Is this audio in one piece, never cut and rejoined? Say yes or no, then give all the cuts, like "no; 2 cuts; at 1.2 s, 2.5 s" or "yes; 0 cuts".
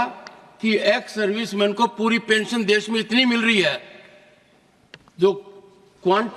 yes; 0 cuts